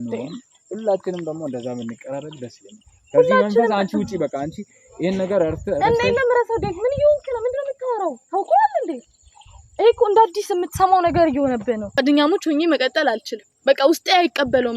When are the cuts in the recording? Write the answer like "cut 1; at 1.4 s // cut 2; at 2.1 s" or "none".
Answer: cut 1; at 12.0 s